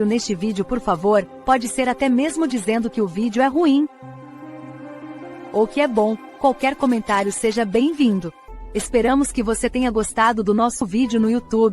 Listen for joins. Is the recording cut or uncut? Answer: cut